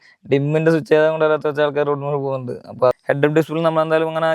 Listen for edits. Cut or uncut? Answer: cut